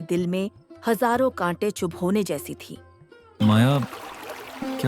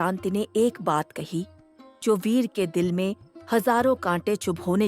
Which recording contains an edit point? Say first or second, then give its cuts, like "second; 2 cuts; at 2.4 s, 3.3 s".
first; 1 cut; at 3.3 s